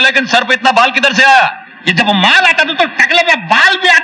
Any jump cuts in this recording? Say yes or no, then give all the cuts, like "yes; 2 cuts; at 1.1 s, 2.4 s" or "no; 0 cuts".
no; 0 cuts